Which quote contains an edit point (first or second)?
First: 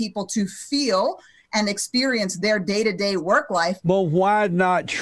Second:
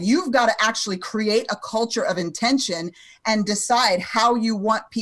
first